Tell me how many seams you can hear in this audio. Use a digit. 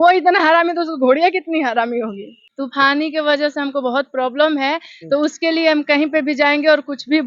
1